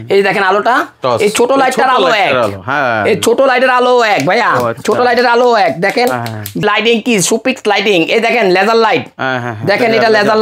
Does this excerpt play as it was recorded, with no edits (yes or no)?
no